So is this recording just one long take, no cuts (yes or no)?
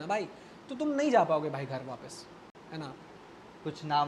yes